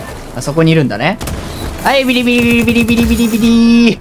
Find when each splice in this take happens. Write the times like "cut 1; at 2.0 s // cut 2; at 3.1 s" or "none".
none